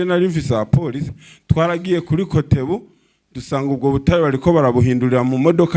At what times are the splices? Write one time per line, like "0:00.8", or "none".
0:01.3

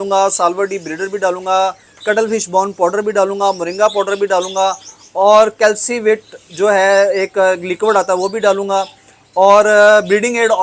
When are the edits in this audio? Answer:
none

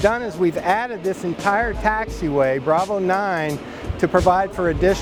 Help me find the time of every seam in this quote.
none

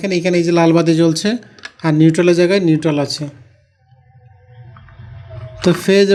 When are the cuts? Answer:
none

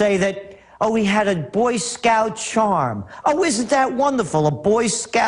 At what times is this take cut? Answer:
0:00.9

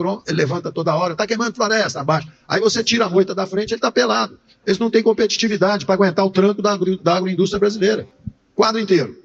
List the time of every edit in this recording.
0:08.2

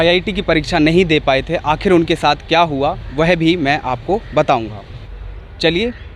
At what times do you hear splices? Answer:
none

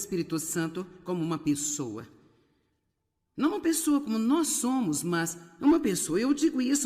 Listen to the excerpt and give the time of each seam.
none

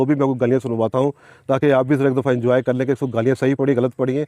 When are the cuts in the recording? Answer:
none

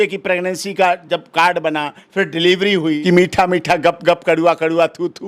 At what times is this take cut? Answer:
0:03.0

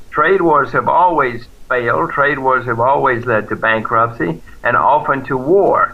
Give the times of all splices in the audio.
none

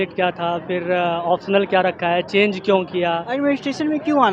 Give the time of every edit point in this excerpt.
0:03.3

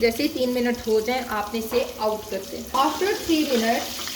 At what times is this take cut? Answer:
0:02.7

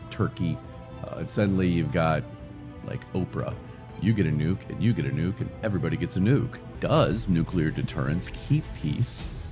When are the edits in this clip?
0:06.6

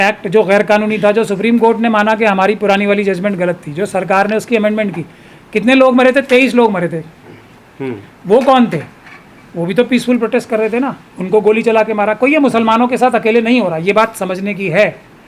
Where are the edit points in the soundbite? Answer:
none

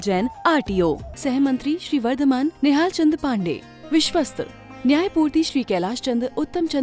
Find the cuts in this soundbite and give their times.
none

